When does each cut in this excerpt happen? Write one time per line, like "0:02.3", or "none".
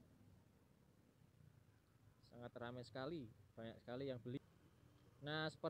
0:04.4